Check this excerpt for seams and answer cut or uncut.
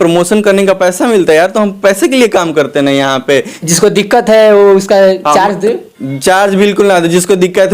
cut